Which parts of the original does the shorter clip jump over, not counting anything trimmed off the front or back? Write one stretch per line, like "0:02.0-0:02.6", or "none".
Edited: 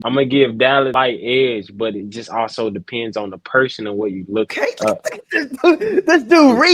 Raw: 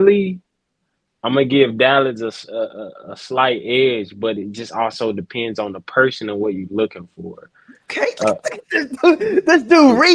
0:02.1-0:03.4
0:06.9-0:07.9

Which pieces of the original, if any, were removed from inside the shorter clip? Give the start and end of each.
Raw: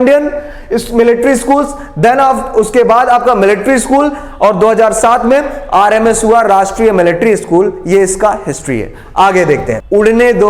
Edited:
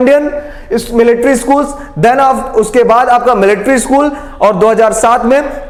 none

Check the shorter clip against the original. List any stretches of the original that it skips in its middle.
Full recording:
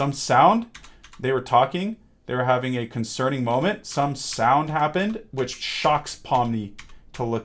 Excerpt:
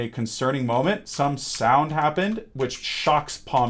none

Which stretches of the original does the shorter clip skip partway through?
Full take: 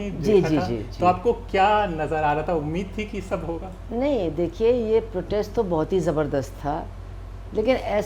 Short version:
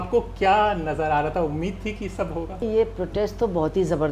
0:03.8-0:04.8

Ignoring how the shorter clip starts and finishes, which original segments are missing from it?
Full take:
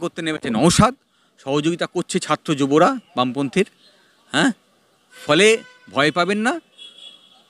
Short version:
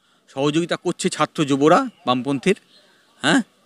none

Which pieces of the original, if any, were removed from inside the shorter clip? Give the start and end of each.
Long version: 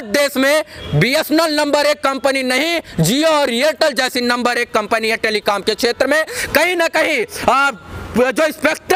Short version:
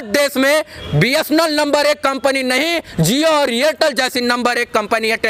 none

